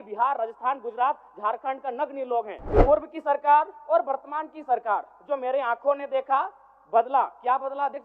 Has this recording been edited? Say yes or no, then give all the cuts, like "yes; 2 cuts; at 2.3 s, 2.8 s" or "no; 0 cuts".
yes; 1 cut; at 2.6 s